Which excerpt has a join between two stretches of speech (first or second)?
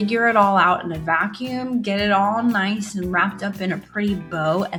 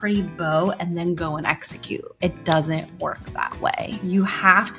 second